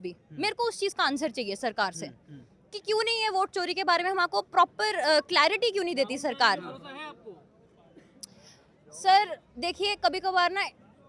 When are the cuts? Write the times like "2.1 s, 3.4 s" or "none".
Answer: none